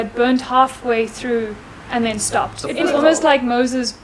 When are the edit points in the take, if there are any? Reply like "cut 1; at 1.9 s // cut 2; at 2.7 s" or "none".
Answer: cut 1; at 2.8 s